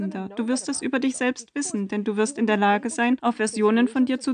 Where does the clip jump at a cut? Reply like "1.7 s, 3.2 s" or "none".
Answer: 3.2 s